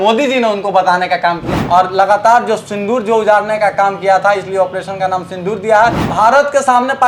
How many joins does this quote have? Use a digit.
2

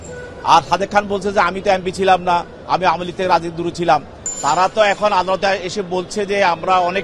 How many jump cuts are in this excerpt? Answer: 1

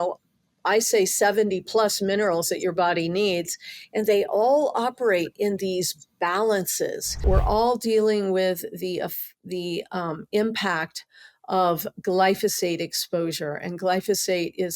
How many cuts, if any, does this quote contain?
1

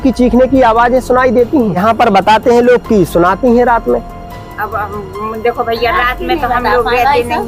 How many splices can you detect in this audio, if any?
0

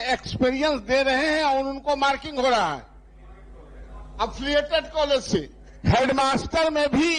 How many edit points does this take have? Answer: 0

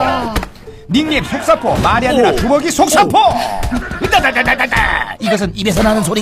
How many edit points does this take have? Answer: 0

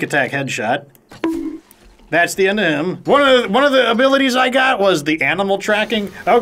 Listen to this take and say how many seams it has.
1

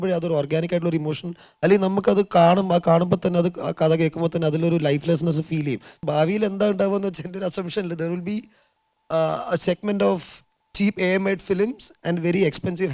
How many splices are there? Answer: 1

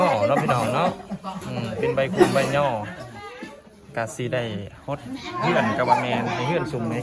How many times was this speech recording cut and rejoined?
0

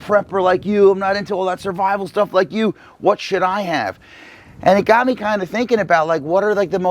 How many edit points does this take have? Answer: 0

